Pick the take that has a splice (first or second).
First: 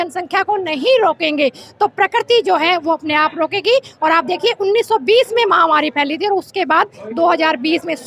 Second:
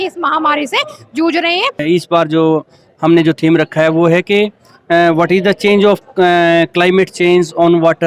second